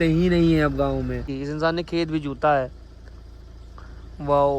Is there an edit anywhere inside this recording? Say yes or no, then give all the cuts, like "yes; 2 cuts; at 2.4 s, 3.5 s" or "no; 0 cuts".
yes; 1 cut; at 1.4 s